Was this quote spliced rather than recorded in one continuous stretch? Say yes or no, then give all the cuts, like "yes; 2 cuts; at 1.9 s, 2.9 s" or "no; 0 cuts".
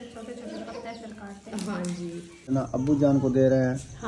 yes; 1 cut; at 2.5 s